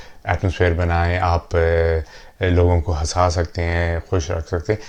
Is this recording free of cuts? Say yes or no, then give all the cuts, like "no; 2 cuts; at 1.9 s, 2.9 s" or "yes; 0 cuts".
yes; 0 cuts